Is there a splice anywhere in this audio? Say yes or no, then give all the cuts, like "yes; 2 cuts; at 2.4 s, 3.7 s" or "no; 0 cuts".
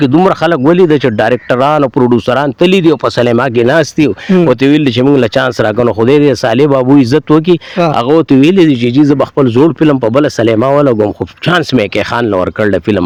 no; 0 cuts